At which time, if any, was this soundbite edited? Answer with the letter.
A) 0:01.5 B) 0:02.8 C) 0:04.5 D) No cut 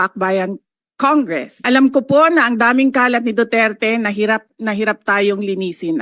A